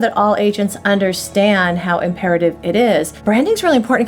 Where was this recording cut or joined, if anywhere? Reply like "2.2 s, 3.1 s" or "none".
3.2 s